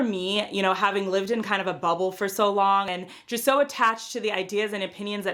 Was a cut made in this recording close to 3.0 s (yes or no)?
yes